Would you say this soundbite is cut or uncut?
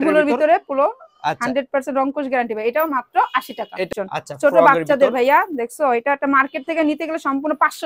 cut